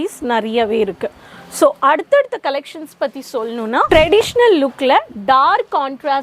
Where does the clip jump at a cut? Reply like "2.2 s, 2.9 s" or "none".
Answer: 3.9 s